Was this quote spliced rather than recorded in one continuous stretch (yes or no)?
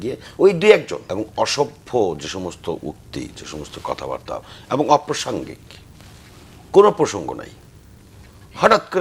yes